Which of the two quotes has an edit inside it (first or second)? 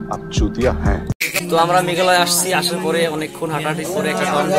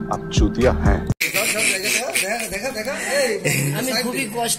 first